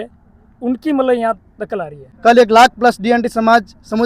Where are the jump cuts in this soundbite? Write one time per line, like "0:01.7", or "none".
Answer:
0:02.0